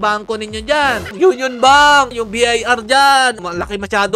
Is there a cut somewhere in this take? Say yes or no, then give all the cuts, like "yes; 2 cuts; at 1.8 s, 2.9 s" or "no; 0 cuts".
yes; 3 cuts; at 1.1 s, 2.1 s, 3.4 s